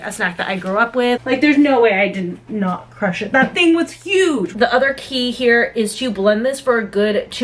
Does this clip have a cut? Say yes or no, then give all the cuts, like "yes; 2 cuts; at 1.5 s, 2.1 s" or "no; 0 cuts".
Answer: yes; 2 cuts; at 1.2 s, 4.5 s